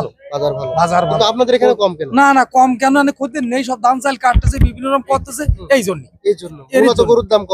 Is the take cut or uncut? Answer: uncut